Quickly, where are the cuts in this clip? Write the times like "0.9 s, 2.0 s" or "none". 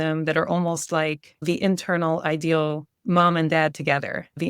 2.9 s